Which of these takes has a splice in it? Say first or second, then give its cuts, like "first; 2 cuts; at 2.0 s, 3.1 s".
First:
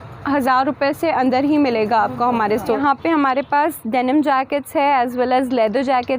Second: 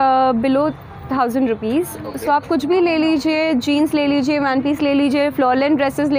first; 1 cut; at 2.8 s